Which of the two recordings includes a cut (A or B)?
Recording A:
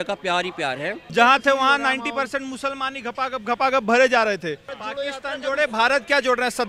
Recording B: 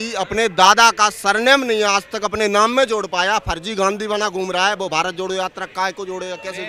A